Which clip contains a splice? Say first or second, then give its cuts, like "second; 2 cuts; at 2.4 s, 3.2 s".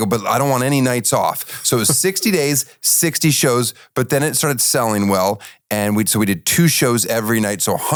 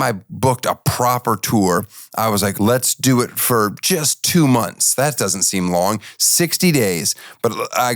second; 1 cut; at 2.5 s